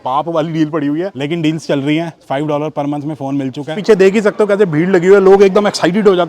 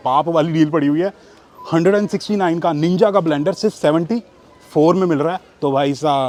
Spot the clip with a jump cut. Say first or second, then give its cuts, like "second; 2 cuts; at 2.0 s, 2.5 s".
first; 2 cuts; at 1.2 s, 3.8 s